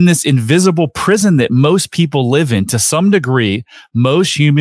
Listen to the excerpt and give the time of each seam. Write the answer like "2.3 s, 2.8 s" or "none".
none